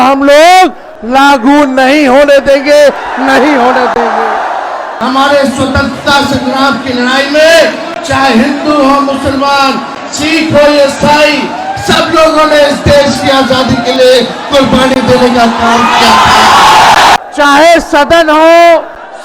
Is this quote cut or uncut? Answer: cut